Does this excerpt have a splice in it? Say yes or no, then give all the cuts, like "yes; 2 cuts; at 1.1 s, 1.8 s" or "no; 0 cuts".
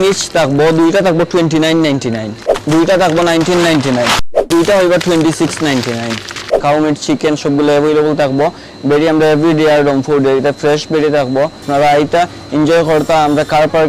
yes; 4 cuts; at 2.4 s, 4.5 s, 6.6 s, 11.6 s